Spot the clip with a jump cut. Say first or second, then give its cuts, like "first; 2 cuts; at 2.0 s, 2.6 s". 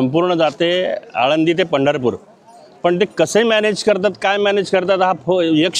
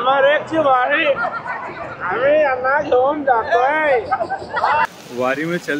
second; 1 cut; at 4.9 s